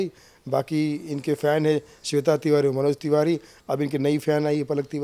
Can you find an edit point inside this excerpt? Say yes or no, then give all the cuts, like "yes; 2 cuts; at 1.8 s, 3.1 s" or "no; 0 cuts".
no; 0 cuts